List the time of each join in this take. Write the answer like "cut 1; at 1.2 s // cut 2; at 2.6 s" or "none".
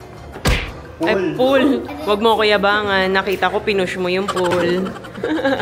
cut 1; at 1.9 s